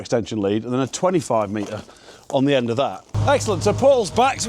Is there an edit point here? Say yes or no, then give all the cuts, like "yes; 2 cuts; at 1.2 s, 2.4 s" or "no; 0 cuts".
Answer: yes; 1 cut; at 3.1 s